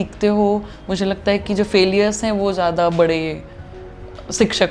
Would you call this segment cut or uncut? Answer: uncut